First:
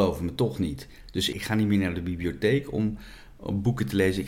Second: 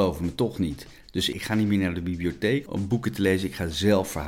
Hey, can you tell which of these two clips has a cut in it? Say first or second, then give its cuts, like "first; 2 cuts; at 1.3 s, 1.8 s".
second; 1 cut; at 2.7 s